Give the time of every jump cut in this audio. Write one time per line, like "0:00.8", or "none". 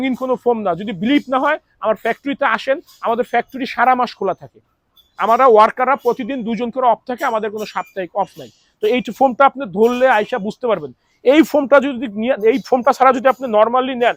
none